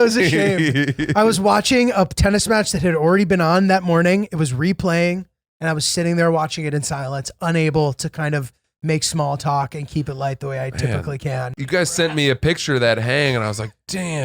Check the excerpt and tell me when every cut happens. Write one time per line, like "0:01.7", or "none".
0:11.6